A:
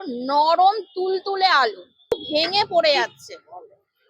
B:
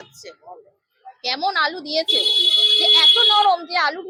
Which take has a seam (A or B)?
A